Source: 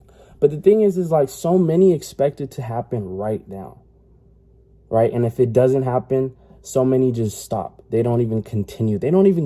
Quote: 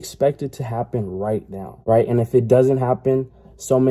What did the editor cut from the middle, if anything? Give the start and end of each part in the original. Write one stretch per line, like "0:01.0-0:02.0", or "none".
0:03.7-0:04.8